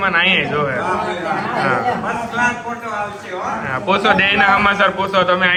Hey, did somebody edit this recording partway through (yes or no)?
no